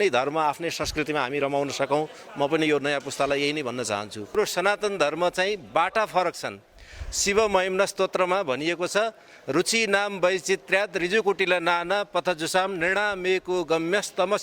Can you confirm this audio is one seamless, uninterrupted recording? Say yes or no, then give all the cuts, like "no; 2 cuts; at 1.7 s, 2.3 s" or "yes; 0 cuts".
no; 1 cut; at 4.3 s